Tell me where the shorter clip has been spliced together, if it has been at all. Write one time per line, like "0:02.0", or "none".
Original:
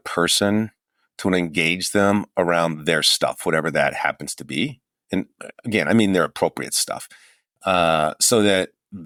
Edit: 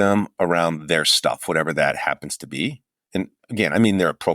0:03.4